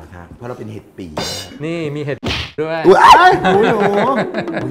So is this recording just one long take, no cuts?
no; 1 cut; at 1.4 s

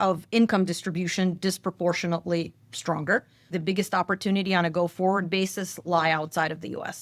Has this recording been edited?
yes; 1 cut; at 3.5 s

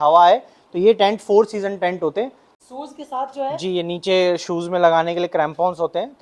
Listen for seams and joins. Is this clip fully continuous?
no; 1 cut; at 2.4 s

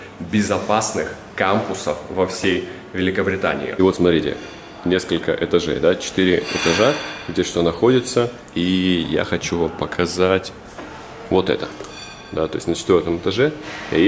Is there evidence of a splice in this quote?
no; 0 cuts

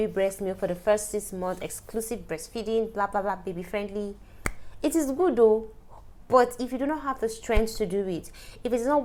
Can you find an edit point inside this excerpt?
no; 0 cuts

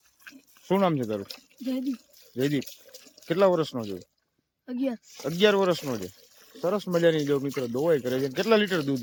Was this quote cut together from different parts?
no; 0 cuts

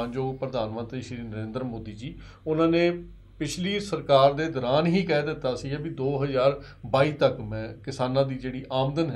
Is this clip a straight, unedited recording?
yes; 0 cuts

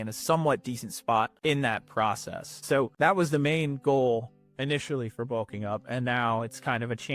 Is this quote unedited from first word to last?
no; 2 cuts; at 1.3 s, 2.9 s

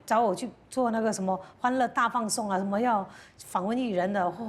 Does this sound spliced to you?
no; 0 cuts

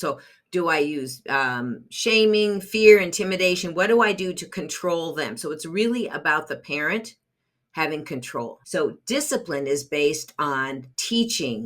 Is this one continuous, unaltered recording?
no; 1 cut; at 8.6 s

